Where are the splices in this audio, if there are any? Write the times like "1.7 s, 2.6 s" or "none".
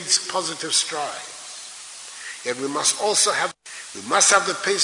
3.6 s